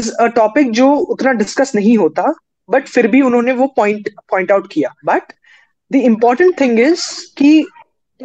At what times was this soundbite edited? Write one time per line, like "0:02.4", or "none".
0:04.9